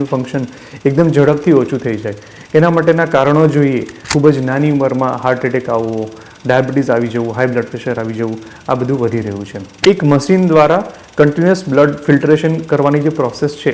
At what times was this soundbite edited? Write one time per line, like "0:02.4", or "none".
0:04.1
0:09.8